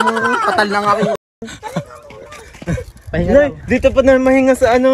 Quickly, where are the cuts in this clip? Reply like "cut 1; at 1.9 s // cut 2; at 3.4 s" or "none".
none